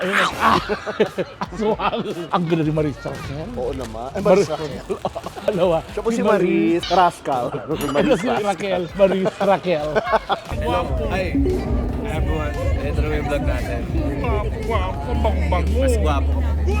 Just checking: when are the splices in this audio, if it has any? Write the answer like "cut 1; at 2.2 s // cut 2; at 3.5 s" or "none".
cut 1; at 10.5 s

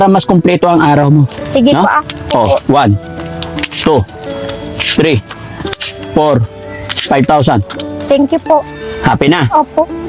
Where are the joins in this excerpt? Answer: none

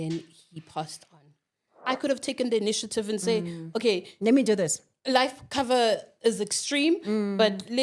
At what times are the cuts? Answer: cut 1; at 1.9 s

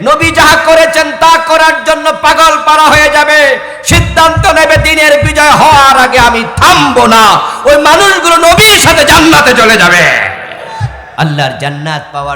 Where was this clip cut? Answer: cut 1; at 11.0 s

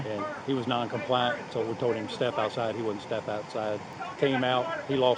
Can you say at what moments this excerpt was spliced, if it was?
cut 1; at 4.0 s

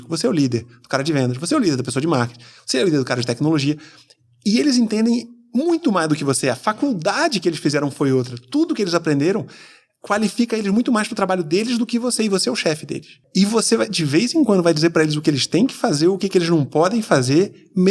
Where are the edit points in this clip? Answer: cut 1; at 13.2 s

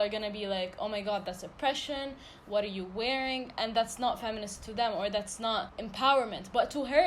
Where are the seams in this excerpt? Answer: cut 1; at 5.8 s

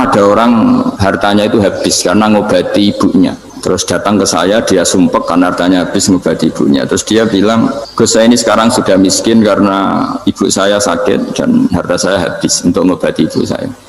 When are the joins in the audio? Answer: cut 1; at 1.0 s // cut 2; at 3.5 s // cut 3; at 7.8 s

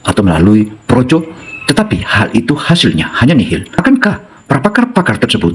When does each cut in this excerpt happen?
cut 1; at 3.7 s

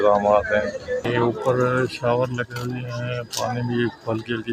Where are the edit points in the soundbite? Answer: cut 1; at 1.1 s

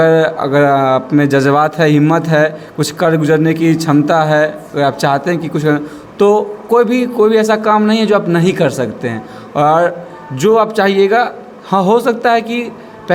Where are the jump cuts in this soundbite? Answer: none

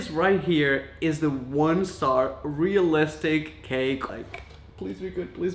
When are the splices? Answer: cut 1; at 4.1 s

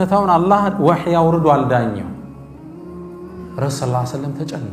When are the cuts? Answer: cut 1; at 2.2 s // cut 2; at 3.6 s

